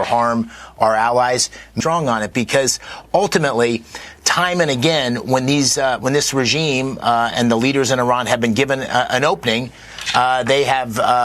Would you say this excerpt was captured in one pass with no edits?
no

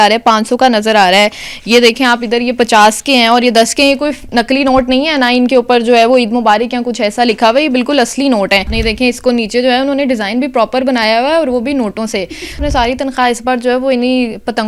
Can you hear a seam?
yes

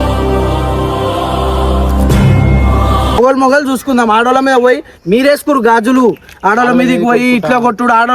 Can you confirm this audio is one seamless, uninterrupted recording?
yes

